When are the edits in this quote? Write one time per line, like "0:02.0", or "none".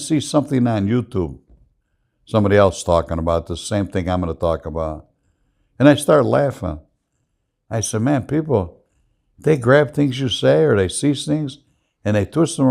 none